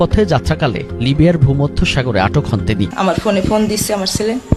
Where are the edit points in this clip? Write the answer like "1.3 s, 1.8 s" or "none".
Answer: 2.9 s